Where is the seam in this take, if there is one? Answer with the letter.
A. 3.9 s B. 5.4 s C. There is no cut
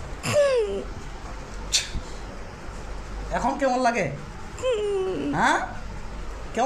C